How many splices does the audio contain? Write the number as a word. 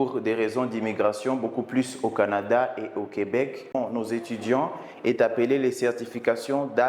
one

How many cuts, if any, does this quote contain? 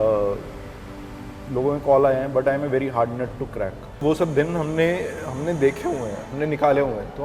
one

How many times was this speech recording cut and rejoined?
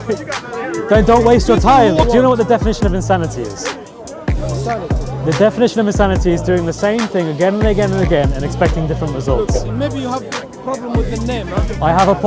two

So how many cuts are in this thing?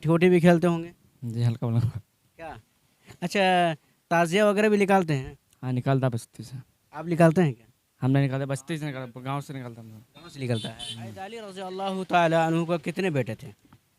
one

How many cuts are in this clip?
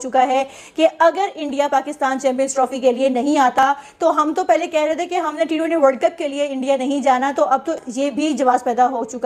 zero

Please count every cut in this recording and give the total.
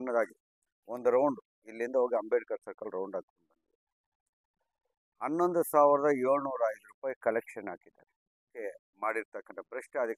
one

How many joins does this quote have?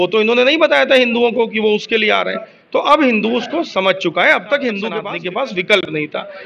one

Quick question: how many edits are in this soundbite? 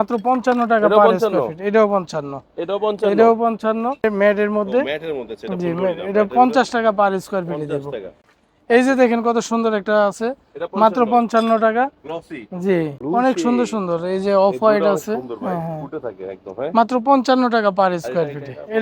three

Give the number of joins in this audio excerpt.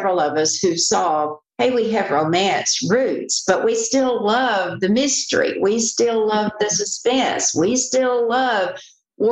zero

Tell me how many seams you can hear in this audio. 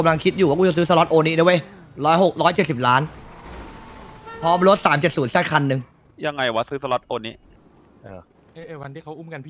one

